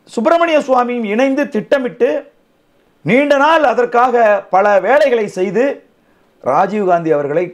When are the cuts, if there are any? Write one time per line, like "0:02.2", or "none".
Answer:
none